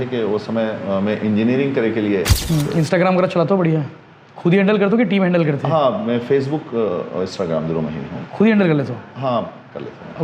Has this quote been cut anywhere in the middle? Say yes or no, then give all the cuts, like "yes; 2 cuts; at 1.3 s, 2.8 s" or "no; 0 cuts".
yes; 1 cut; at 2.4 s